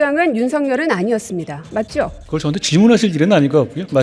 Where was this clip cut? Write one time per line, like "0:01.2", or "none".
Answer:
0:02.2